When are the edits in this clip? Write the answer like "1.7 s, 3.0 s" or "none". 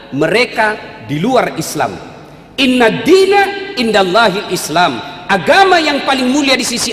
none